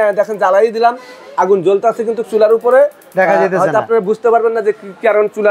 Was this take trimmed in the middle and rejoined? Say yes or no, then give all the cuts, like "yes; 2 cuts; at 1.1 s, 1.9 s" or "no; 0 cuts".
no; 0 cuts